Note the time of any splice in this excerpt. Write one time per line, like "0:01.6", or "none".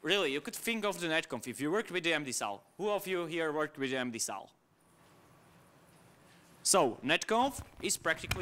none